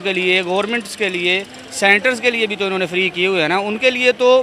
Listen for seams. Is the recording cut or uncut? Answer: uncut